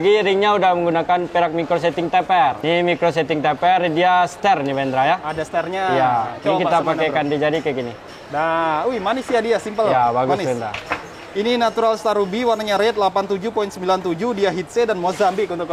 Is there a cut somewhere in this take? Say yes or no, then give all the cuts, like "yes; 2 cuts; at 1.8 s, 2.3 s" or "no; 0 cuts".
no; 0 cuts